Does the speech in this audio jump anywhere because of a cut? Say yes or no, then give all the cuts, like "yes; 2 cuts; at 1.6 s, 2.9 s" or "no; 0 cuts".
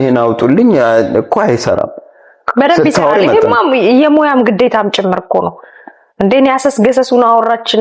no; 0 cuts